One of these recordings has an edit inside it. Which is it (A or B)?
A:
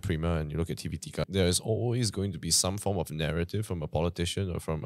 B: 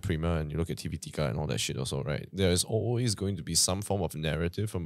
A